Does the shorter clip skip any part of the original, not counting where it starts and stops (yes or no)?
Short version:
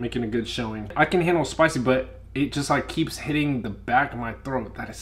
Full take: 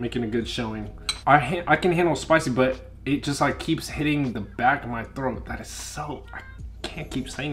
yes